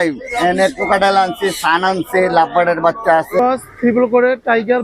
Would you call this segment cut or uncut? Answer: cut